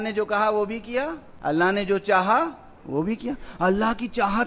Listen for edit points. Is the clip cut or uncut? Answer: uncut